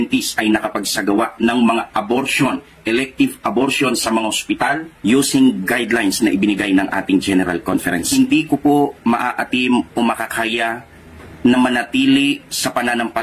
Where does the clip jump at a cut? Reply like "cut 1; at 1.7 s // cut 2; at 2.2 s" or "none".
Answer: cut 1; at 2.8 s // cut 2; at 8.0 s // cut 3; at 12.1 s